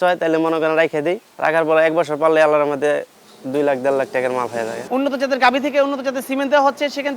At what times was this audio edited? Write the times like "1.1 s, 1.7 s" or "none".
1.3 s, 4.8 s